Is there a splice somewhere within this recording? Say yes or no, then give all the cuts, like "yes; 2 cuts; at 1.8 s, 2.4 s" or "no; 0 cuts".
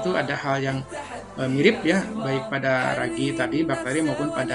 no; 0 cuts